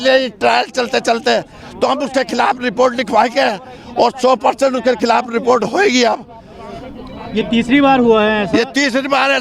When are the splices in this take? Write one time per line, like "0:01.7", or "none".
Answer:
none